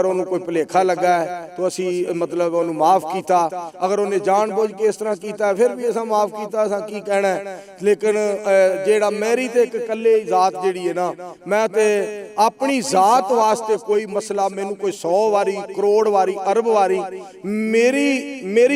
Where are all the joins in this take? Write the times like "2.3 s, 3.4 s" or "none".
none